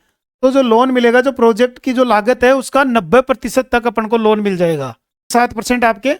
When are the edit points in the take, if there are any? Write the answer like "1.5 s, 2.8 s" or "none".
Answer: 5.3 s